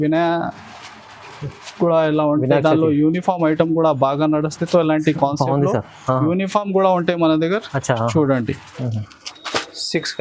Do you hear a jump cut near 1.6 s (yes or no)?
no